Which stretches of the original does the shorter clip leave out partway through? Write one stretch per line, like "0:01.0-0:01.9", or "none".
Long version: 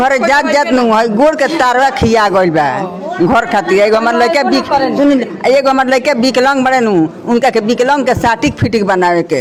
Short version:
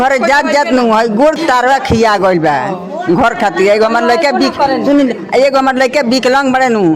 0:01.4-0:01.5